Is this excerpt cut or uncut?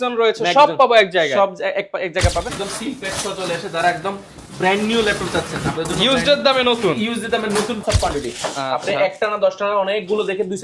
cut